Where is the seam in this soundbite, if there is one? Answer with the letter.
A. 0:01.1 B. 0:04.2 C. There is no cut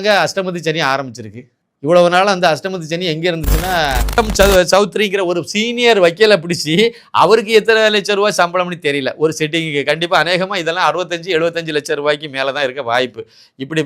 B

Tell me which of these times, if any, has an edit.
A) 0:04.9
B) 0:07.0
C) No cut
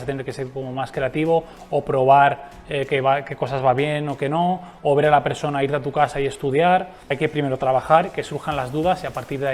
B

